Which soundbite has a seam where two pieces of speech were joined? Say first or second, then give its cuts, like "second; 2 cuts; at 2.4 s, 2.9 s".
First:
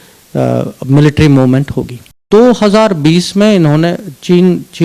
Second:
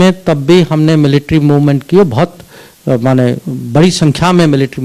first; 1 cut; at 2.2 s